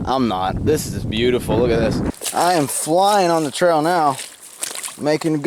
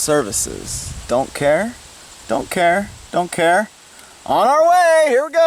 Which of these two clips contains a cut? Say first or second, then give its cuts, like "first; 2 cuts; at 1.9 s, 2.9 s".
first; 1 cut; at 2.1 s